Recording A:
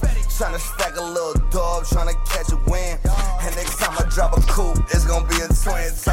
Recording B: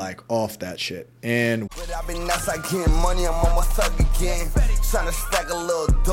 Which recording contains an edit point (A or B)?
B